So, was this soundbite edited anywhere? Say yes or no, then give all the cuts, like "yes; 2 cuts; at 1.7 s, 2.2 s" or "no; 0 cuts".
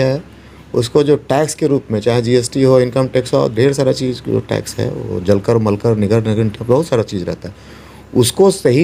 no; 0 cuts